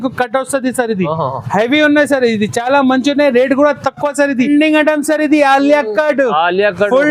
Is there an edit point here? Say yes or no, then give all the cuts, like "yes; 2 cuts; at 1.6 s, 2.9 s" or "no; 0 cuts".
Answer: yes; 1 cut; at 4.5 s